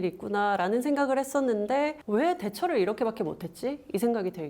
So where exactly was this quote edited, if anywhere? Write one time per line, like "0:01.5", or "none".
0:02.0